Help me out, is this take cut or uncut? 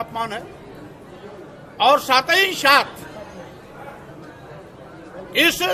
uncut